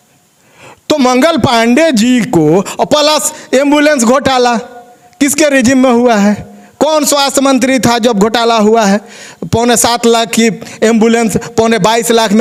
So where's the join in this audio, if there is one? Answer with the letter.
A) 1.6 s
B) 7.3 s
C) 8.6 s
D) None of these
D